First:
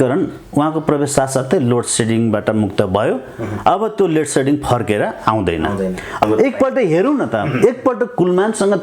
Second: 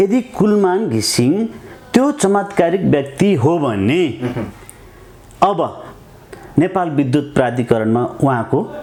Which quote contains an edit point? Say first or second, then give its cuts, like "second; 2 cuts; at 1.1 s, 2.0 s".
first; 1 cut; at 6.2 s